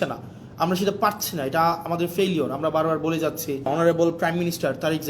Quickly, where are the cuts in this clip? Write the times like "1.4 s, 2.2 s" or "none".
3.7 s